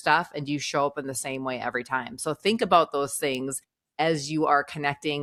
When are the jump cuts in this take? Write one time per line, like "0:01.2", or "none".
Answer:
none